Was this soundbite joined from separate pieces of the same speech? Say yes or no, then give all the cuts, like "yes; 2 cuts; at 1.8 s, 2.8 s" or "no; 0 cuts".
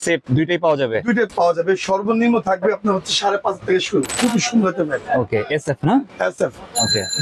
yes; 2 cuts; at 1.3 s, 4.2 s